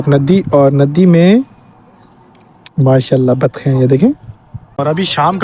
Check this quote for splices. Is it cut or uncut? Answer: uncut